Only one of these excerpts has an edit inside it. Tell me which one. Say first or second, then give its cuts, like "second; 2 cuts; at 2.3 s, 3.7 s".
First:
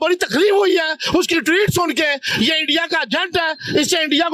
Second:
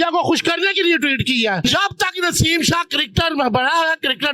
second; 1 cut; at 1.6 s